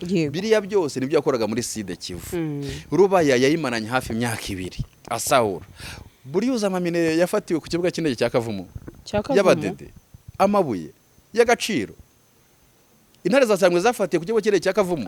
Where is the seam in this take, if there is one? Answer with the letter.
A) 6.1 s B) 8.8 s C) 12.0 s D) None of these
D